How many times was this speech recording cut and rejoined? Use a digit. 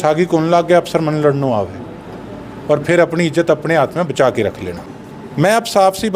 1